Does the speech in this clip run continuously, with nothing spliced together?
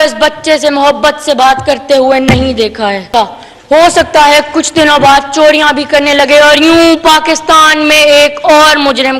no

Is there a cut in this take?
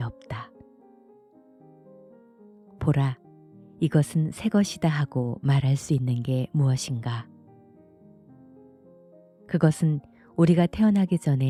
no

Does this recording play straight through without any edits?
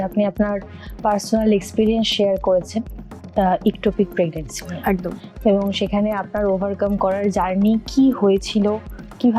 yes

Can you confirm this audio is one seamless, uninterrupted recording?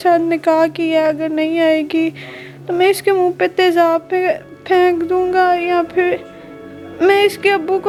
yes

